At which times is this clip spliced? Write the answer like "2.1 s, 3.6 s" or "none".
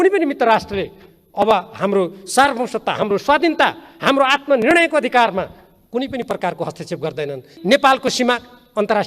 7.5 s